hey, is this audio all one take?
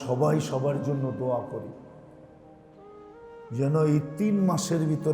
no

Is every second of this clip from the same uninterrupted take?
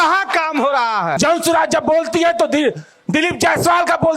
no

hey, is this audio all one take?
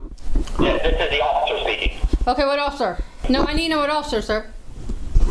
no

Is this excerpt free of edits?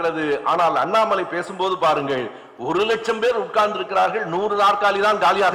yes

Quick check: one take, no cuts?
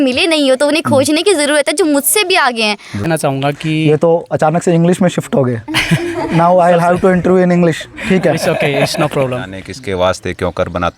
no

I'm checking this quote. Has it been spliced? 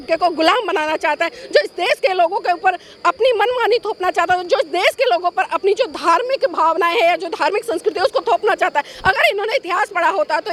no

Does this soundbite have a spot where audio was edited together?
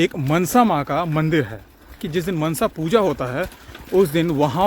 yes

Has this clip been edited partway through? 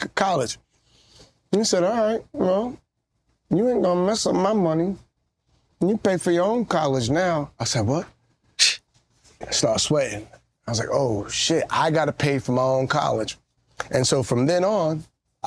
no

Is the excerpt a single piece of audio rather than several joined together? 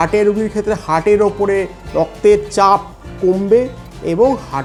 yes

